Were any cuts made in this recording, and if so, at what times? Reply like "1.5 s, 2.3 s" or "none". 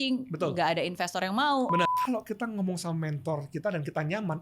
1.9 s